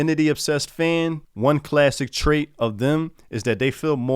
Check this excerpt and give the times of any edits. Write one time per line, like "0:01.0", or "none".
0:01.2